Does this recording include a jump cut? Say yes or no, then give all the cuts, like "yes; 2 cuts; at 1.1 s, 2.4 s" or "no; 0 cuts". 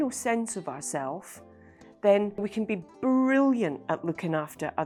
no; 0 cuts